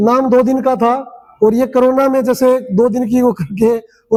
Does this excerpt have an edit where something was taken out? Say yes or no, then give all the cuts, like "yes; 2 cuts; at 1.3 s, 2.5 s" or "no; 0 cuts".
no; 0 cuts